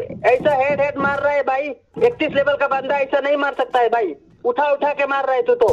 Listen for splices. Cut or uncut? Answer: uncut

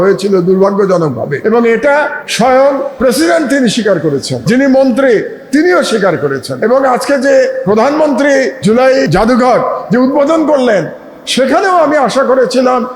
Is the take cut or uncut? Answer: cut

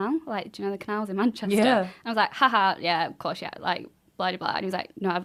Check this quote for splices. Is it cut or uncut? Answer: uncut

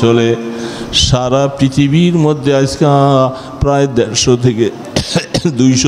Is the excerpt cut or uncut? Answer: uncut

